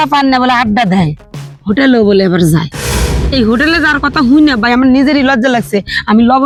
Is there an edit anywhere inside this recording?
no; 0 cuts

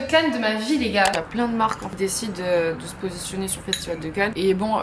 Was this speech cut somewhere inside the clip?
yes; 1 cut; at 1.1 s

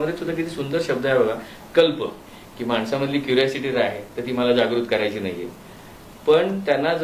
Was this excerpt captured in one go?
no; 1 cut; at 2.2 s

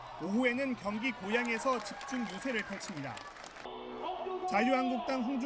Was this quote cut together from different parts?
no; 0 cuts

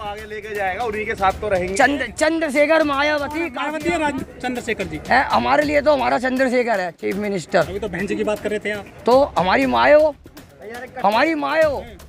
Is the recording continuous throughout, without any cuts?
no; 1 cut; at 3.5 s

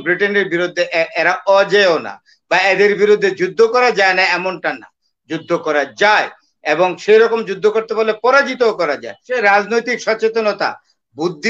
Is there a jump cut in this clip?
yes; 1 cut; at 9.2 s

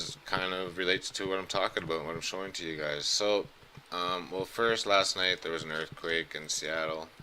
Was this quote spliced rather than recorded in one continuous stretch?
yes; 1 cut; at 1.7 s

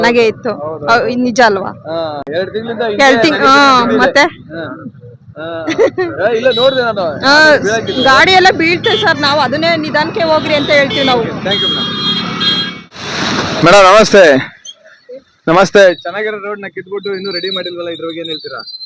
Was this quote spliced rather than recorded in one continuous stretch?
no; 0 cuts

